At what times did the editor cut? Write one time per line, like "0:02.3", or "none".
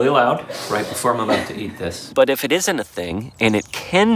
0:02.1